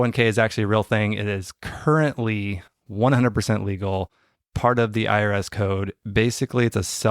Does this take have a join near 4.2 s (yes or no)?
no